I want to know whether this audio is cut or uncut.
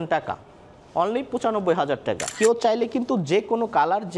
cut